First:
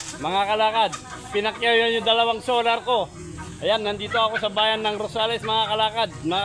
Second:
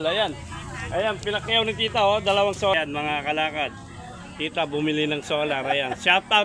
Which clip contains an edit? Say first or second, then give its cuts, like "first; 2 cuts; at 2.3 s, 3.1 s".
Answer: second; 1 cut; at 2.8 s